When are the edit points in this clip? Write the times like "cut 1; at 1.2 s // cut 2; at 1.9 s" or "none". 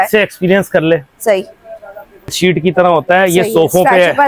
cut 1; at 2.3 s